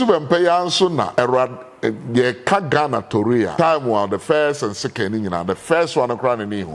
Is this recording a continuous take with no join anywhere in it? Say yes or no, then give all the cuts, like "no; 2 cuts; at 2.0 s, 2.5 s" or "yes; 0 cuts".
no; 2 cuts; at 1.1 s, 3.5 s